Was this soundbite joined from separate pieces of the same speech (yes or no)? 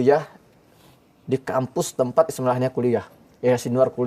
no